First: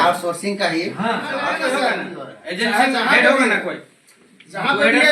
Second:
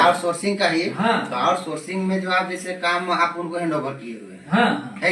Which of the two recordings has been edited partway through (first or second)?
first